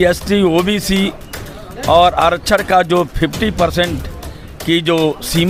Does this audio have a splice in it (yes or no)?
no